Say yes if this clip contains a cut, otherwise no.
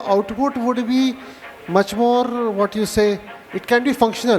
no